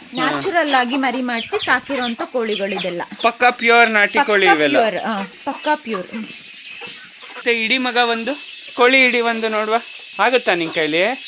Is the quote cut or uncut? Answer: cut